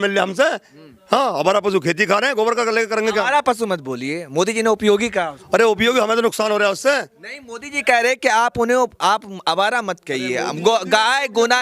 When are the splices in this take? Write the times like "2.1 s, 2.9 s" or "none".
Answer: none